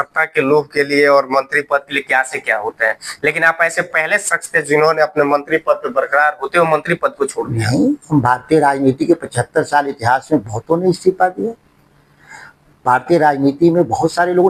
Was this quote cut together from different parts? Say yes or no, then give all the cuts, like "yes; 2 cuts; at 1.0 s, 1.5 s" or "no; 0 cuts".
no; 0 cuts